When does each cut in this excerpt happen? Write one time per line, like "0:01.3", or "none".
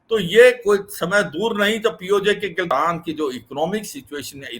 0:02.7